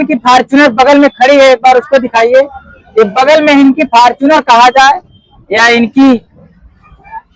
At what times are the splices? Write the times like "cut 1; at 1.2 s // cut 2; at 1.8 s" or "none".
none